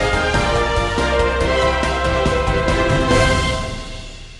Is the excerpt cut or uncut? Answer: uncut